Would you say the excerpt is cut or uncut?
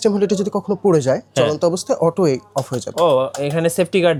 uncut